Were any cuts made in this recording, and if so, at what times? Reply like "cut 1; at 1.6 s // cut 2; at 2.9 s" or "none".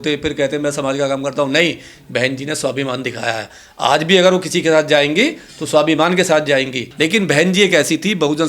cut 1; at 6.8 s